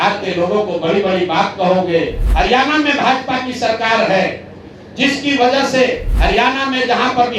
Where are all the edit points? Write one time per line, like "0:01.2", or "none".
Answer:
0:02.2
0:06.1